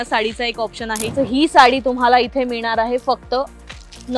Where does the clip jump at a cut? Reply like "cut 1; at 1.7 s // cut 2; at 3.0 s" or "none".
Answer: cut 1; at 1.0 s